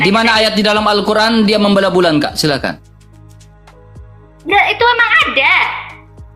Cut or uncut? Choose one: uncut